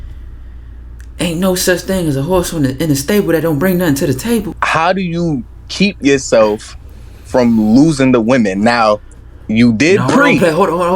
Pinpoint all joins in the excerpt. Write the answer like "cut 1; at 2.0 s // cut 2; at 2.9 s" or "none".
cut 1; at 4.6 s

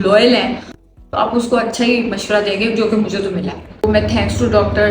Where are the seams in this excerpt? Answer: cut 1; at 3.8 s

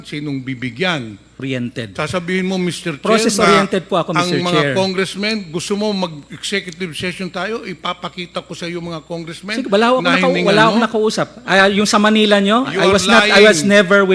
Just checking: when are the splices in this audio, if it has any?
cut 1; at 1.3 s

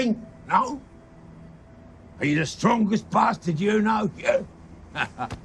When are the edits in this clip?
none

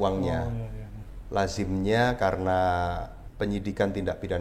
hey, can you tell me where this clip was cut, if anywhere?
cut 1; at 3.2 s

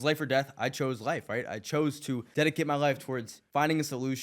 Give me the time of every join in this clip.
cut 1; at 2.3 s // cut 2; at 3.3 s

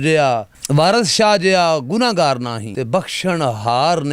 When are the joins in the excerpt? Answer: cut 1; at 2.6 s

